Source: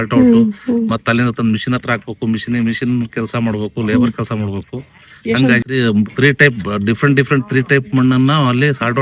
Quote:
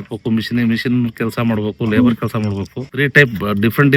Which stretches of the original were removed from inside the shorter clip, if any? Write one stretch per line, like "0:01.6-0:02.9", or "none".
0:04.9-0:06.2